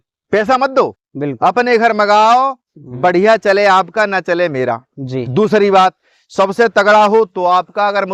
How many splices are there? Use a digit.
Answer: 0